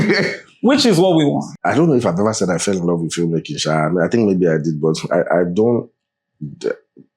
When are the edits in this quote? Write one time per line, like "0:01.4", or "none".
0:01.5